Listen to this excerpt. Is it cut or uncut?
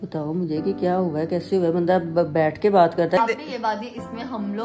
cut